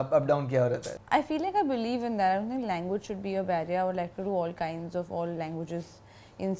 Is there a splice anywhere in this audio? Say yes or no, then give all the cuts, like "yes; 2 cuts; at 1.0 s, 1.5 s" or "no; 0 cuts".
yes; 1 cut; at 0.9 s